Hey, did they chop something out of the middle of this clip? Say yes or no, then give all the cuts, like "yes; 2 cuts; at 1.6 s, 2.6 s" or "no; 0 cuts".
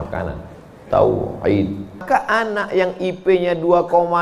yes; 1 cut; at 2.0 s